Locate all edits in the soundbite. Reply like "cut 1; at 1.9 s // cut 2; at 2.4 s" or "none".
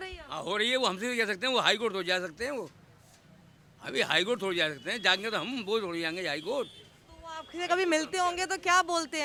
none